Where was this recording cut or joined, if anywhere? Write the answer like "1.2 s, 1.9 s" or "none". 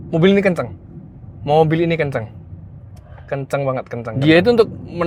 4.1 s